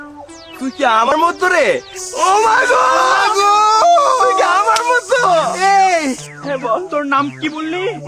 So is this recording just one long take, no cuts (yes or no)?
no